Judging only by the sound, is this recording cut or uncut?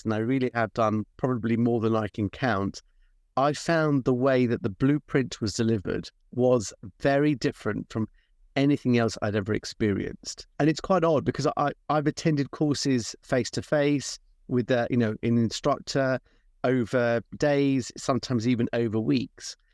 cut